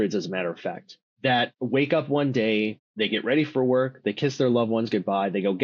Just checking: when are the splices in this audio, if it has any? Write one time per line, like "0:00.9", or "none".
0:01.4
0:02.8